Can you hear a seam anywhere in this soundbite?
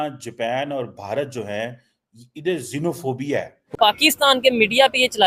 yes; 1 cut; at 3.8 s

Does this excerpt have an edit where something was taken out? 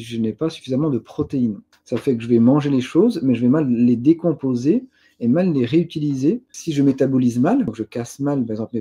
yes; 3 cuts; at 1.7 s, 6.6 s, 7.8 s

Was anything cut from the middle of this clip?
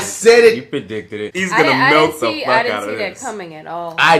yes; 1 cut; at 1.2 s

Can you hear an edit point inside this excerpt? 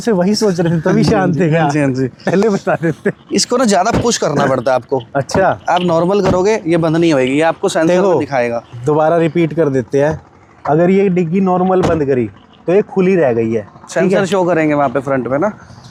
no; 0 cuts

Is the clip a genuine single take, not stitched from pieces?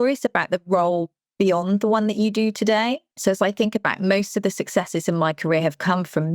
no; 1 cut; at 3.1 s

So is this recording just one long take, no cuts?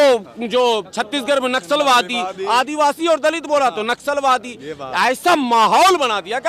yes; 0 cuts

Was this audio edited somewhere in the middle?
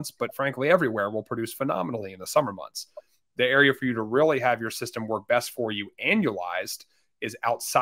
no; 0 cuts

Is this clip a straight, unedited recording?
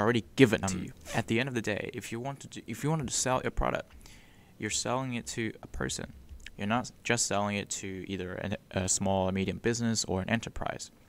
no; 1 cut; at 0.9 s

